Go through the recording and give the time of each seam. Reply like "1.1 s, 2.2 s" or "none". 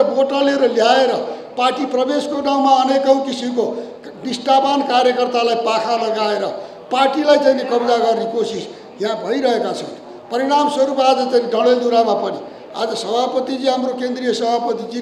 none

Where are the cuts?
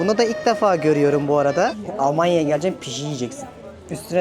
1.8 s

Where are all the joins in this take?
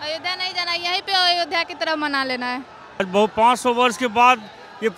3.1 s

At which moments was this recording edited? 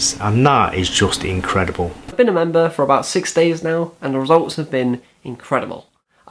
2.1 s

